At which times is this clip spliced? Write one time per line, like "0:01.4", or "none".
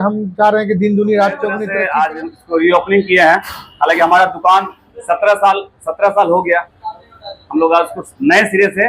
0:01.6